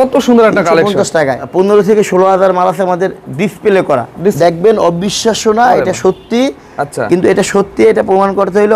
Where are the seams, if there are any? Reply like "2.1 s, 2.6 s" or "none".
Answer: 1.4 s, 4.4 s